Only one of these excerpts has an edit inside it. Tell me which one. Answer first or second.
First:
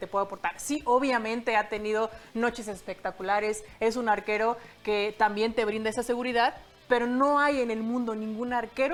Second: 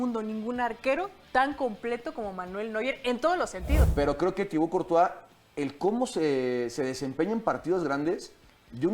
second